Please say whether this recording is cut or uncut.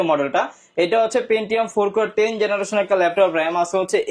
uncut